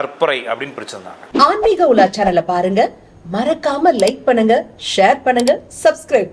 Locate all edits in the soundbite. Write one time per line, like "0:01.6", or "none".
0:01.1